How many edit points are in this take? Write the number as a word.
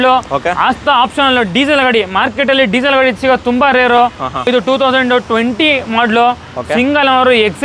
one